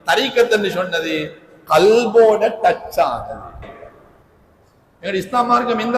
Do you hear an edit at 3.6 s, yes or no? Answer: yes